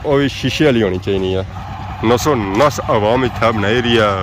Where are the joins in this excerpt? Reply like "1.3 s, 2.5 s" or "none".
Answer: 1.5 s